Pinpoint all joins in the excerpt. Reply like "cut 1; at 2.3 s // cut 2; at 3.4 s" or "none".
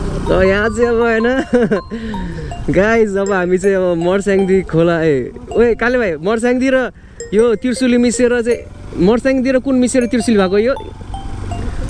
none